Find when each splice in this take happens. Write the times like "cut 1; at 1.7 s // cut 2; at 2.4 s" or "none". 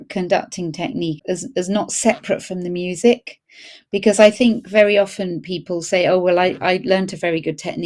cut 1; at 1.2 s

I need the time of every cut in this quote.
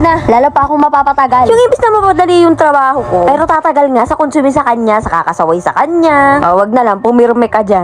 none

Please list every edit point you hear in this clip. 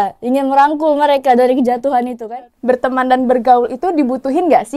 cut 1; at 2.5 s

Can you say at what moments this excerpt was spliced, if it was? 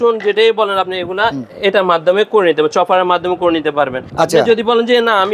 cut 1; at 1.5 s // cut 2; at 4.0 s

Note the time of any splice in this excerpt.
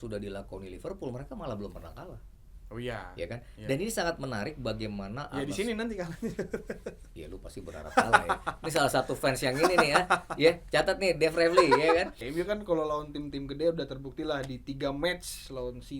cut 1; at 12.2 s

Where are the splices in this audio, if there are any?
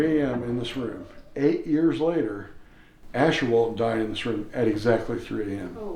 none

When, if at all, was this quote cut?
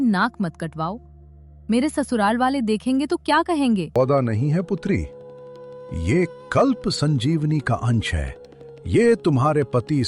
cut 1; at 3.9 s

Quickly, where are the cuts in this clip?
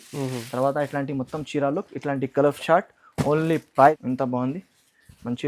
cut 1; at 4.0 s

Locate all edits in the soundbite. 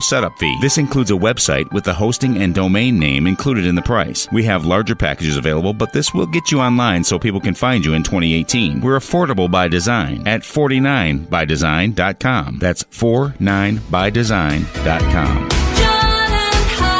none

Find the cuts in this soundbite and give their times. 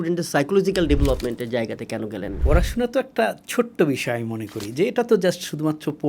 cut 1; at 2.3 s

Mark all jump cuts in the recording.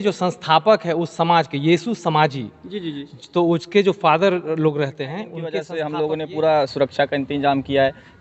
cut 1; at 5.4 s

